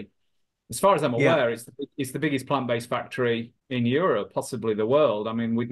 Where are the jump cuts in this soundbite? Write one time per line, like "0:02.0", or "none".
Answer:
0:03.6